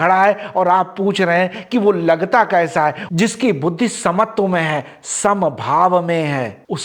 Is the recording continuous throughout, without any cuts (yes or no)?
no